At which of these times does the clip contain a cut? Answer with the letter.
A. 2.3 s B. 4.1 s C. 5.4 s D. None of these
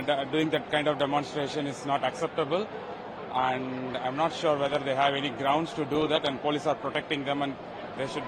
D